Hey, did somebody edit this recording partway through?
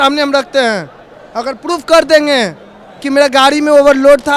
no; 0 cuts

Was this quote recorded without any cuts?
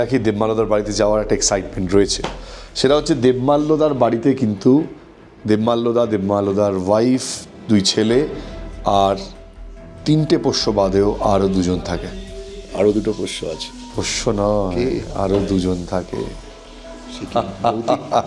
yes; 0 cuts

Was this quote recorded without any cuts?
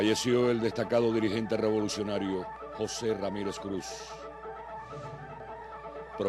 no; 1 cut; at 5.3 s

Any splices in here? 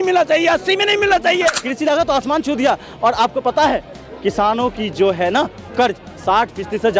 yes; 1 cut; at 1.5 s

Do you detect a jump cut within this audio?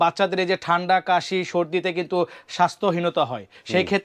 no; 0 cuts

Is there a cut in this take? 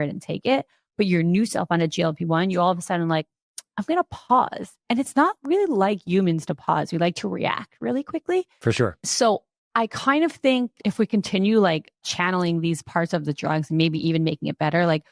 yes; 3 cuts; at 9.0 s, 10.8 s, 12.1 s

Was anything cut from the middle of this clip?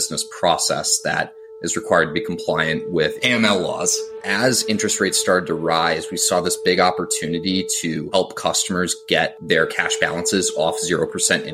yes; 2 cuts; at 4.2 s, 9.4 s

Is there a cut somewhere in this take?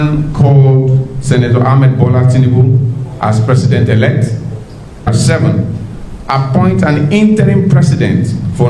yes; 1 cut; at 5.1 s

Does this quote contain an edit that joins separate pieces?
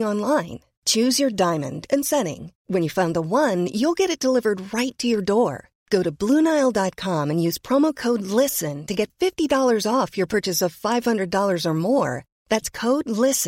no; 0 cuts

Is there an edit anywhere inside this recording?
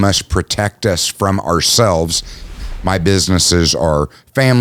yes; 1 cut; at 2.6 s

